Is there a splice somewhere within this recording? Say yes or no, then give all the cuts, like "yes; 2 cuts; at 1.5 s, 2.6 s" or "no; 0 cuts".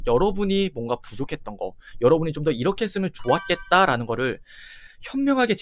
no; 0 cuts